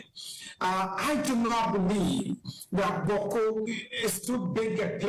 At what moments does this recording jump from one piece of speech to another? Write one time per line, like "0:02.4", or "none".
none